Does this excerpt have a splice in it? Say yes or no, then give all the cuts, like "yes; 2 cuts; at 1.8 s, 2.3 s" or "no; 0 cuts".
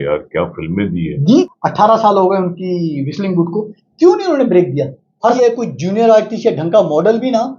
yes; 2 cuts; at 1.5 s, 5.2 s